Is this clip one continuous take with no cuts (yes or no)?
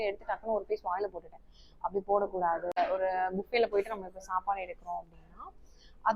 no